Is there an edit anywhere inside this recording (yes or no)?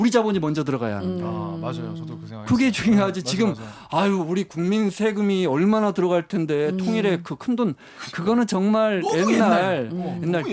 no